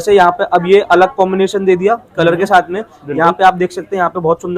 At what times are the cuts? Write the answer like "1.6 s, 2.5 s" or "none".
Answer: none